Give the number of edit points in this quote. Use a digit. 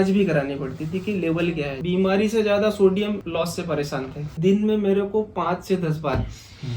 3